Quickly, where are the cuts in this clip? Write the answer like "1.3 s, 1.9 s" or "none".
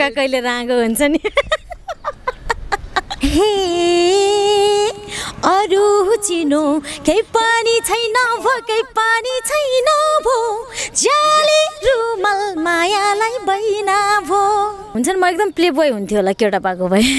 3.0 s, 14.9 s